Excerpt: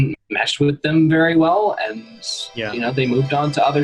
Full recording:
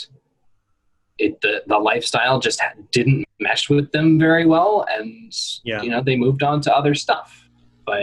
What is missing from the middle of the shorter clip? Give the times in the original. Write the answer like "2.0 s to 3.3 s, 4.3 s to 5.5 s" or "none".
none